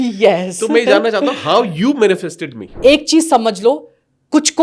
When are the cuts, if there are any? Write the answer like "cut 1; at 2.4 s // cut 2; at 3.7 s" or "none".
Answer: cut 1; at 2.7 s